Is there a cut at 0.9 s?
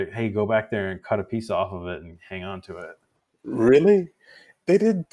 no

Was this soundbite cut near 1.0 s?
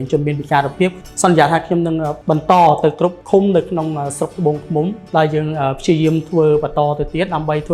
yes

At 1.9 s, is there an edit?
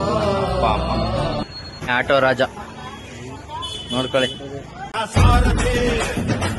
yes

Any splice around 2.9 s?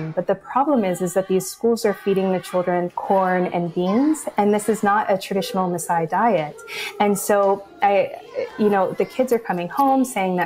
yes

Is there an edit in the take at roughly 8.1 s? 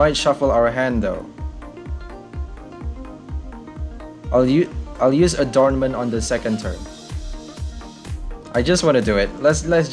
yes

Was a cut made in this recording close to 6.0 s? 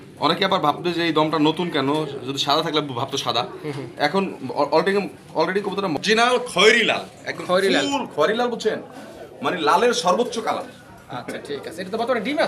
yes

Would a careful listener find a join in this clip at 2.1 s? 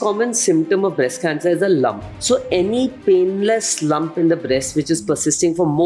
yes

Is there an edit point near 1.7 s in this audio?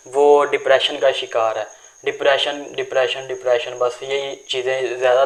no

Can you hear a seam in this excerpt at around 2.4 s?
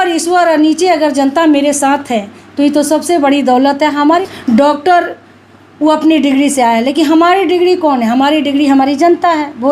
no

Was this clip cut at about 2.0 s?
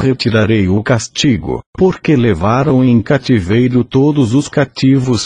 yes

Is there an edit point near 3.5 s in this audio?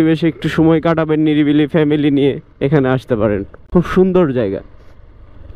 no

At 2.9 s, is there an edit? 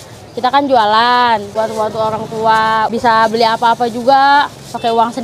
yes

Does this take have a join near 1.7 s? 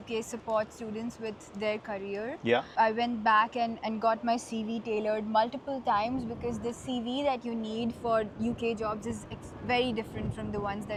no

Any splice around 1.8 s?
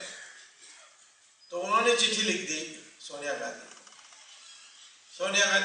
yes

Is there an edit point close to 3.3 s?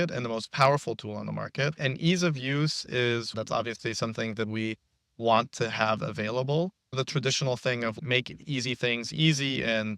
yes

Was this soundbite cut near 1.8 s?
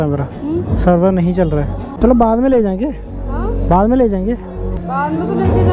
yes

